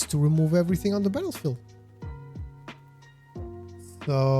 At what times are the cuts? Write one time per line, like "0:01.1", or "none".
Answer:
0:01.9
0:03.5